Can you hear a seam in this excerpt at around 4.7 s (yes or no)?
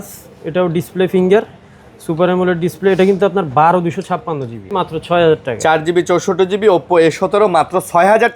yes